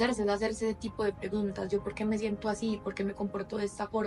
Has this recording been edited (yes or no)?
no